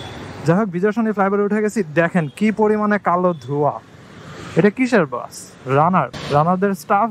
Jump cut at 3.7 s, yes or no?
no